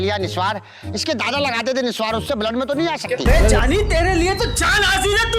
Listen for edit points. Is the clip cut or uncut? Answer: cut